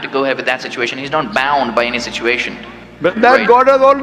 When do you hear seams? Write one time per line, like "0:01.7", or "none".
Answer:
0:03.1

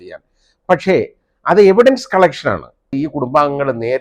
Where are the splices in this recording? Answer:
0:02.9

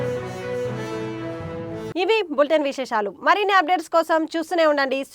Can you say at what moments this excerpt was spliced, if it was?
none

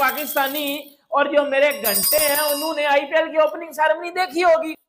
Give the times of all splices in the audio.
none

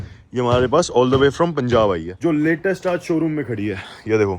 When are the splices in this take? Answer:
0:02.1

